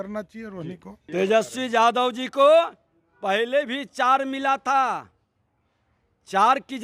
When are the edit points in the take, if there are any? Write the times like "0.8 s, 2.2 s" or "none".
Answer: 1.0 s

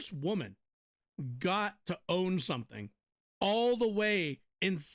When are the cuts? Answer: none

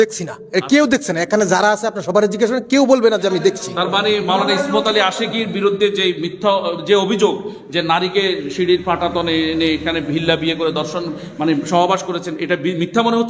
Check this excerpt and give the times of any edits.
none

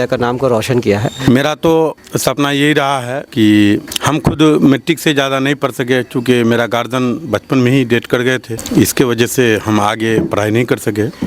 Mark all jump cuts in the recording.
1.2 s, 2.1 s, 3.2 s, 3.9 s, 8.6 s

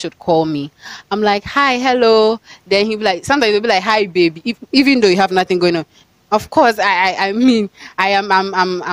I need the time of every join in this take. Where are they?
6.0 s

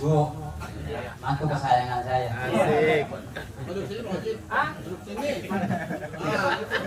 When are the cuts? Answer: none

